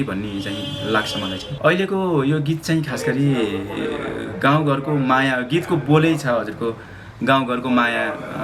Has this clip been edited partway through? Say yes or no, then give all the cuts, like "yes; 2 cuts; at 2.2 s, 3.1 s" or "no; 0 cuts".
yes; 1 cut; at 1.4 s